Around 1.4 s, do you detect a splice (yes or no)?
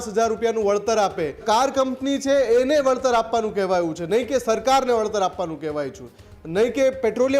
yes